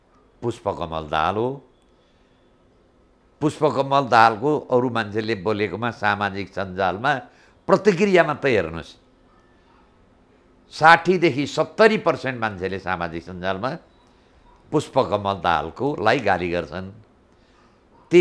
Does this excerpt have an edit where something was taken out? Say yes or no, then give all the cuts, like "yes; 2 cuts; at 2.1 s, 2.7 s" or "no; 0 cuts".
no; 0 cuts